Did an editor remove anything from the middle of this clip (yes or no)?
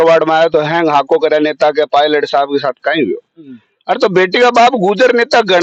no